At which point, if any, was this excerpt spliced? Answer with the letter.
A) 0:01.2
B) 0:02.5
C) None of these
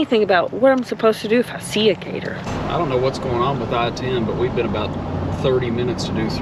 B